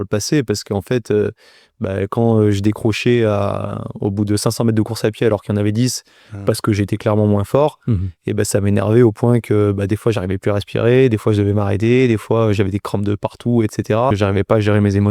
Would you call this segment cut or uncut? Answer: cut